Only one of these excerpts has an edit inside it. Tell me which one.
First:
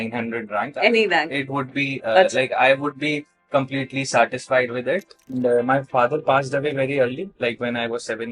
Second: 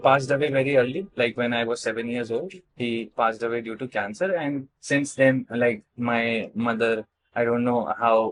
first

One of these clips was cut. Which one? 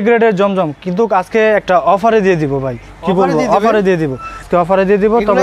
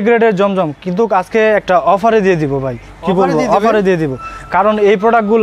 first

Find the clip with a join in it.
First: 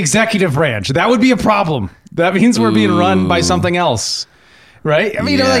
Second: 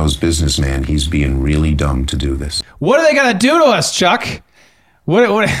second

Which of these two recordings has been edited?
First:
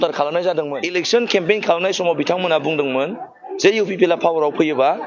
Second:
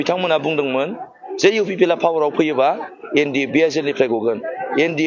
first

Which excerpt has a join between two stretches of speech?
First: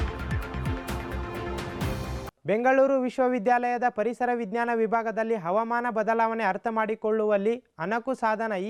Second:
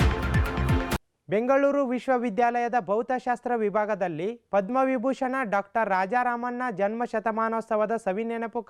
second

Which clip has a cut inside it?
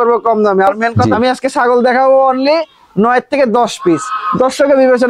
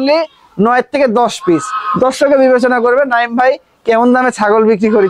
first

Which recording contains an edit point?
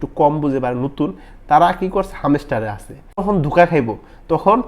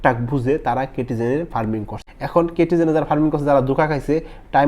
second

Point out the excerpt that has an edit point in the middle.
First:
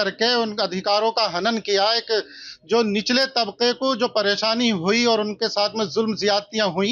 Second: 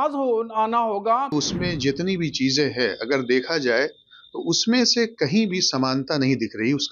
second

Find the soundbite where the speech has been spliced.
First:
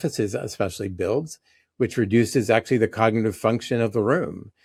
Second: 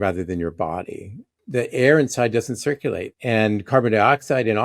second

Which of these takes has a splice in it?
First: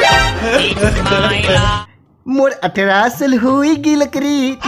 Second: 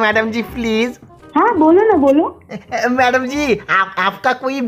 first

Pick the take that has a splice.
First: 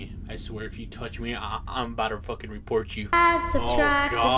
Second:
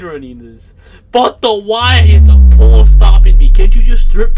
first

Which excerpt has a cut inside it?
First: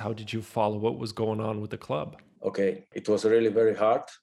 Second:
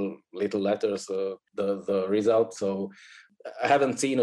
second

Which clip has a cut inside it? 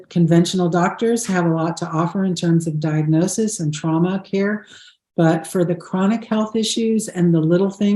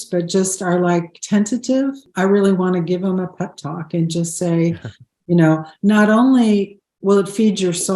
second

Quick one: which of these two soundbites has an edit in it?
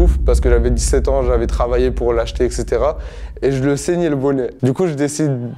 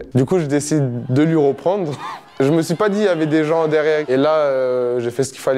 second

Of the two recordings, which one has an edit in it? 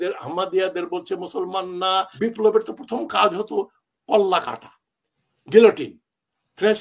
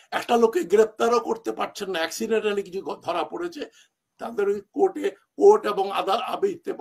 first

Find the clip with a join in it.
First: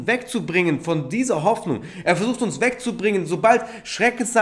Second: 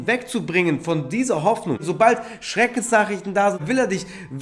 second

